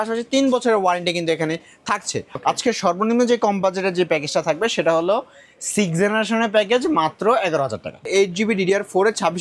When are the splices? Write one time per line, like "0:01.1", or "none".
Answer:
0:02.3
0:08.1